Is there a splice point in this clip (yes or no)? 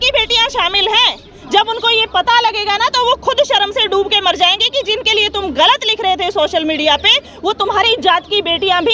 no